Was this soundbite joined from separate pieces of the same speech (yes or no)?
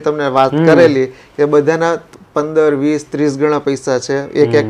no